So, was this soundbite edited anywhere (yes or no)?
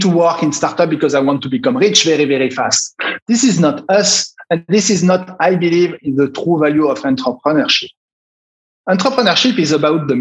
no